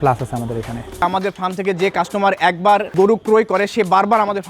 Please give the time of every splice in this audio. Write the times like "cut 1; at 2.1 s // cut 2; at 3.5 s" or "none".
cut 1; at 0.9 s // cut 2; at 2.9 s

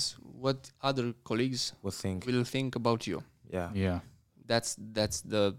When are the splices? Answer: none

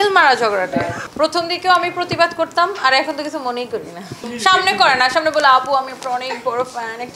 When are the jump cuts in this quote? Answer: none

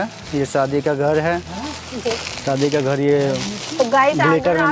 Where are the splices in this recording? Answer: none

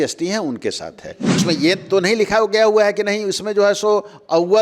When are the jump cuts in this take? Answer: cut 1; at 1.4 s

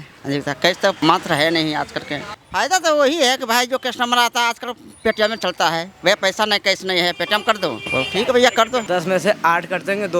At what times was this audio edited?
cut 1; at 1.0 s // cut 2; at 2.2 s // cut 3; at 7.8 s // cut 4; at 8.8 s

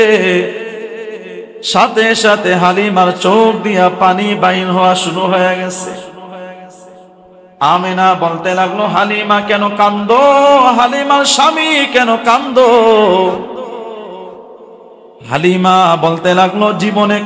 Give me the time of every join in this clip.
none

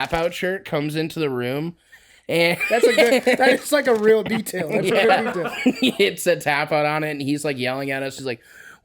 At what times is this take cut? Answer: cut 1; at 5.5 s

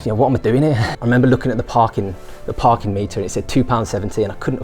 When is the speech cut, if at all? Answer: cut 1; at 0.9 s

